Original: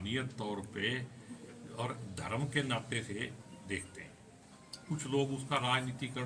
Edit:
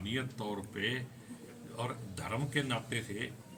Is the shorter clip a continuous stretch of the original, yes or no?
yes